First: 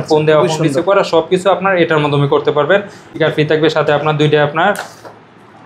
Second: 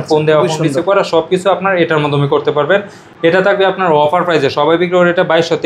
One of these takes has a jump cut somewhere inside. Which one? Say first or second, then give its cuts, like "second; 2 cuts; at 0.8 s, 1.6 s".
first; 1 cut; at 3.1 s